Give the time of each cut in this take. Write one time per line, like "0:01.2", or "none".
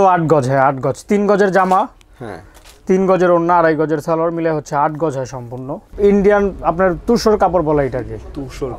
0:05.9